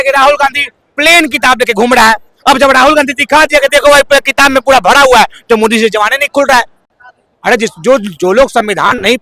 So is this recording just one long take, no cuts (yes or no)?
yes